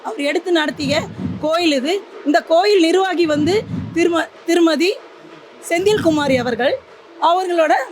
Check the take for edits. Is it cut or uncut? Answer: uncut